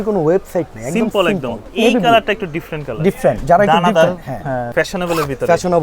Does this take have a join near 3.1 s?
no; 2 cuts; at 1.7 s, 4.6 s

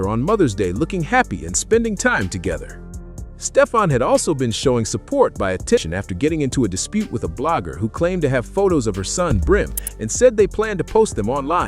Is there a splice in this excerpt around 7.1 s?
no; 1 cut; at 5.8 s

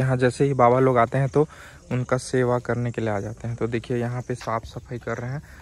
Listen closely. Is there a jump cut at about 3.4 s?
no; 0 cuts

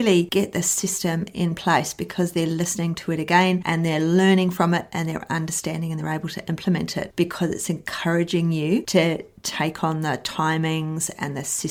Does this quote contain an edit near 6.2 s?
no; 0 cuts

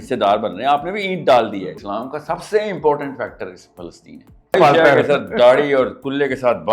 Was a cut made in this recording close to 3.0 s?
no; 2 cuts; at 1.6 s, 4.5 s

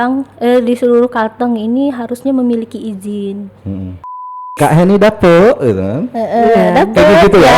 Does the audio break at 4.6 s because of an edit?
yes; 1 cut; at 4.6 s

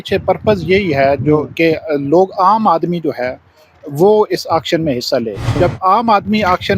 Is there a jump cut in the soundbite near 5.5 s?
yes; 1 cut; at 5.5 s

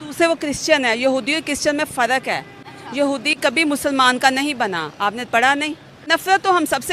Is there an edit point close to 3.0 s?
no; 1 cut; at 5.9 s

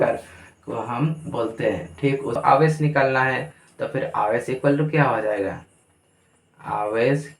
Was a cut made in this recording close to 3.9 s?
no; 1 cut; at 2.4 s

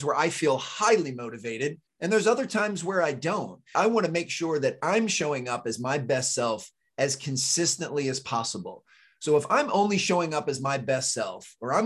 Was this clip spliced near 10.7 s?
no; 2 cuts; at 1.9 s, 3.9 s

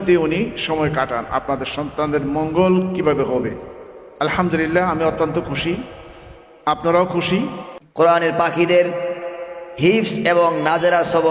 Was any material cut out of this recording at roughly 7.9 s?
yes; 1 cut; at 7.9 s

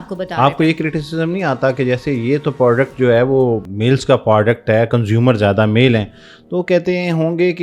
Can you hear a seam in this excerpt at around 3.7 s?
yes; 1 cut; at 3.7 s

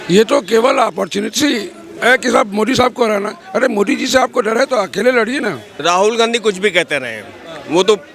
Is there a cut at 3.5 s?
no; 1 cut; at 5.7 s

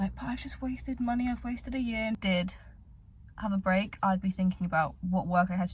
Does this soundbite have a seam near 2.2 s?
yes; 1 cut; at 2.2 s

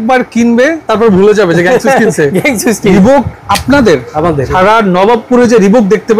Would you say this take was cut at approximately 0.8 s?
yes; 3 cuts; at 0.8 s, 2.9 s, 4.5 s

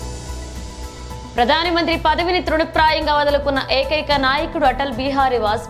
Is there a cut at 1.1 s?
yes; 1 cut; at 1.1 s

